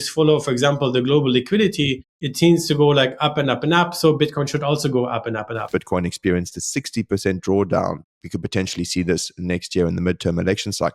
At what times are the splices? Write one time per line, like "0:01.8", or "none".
0:05.7